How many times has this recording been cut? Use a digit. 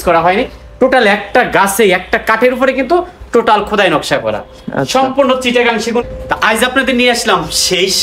1